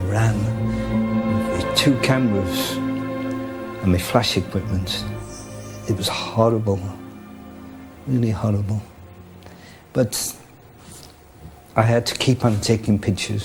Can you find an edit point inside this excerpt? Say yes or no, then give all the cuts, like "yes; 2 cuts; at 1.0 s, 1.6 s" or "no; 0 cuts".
no; 0 cuts